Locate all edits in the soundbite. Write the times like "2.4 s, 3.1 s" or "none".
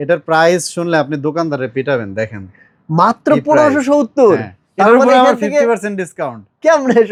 none